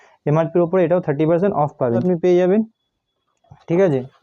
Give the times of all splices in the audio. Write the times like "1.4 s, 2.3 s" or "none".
2.0 s